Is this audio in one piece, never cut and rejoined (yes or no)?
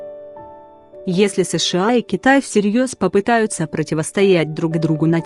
no